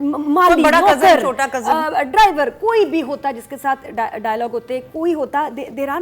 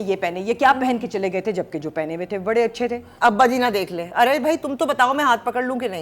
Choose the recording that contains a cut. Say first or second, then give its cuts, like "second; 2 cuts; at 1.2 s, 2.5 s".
second; 1 cut; at 3.0 s